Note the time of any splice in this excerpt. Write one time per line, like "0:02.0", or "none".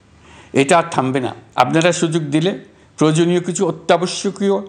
0:01.4